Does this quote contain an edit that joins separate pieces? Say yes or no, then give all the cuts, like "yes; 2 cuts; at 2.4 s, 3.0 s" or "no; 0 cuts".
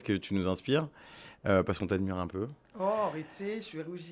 no; 0 cuts